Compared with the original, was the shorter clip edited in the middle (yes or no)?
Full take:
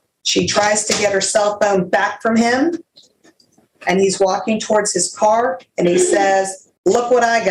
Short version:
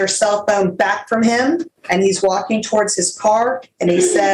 yes